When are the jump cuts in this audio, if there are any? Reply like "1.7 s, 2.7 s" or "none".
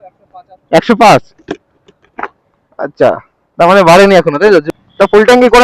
4.7 s